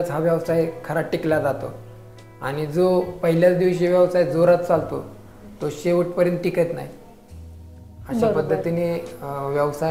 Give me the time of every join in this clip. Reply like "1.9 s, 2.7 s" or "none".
none